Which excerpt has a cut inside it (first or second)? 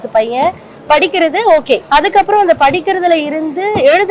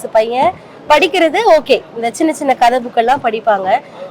first